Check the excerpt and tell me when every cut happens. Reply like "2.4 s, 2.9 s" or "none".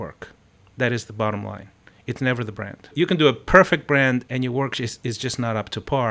2.9 s, 4.3 s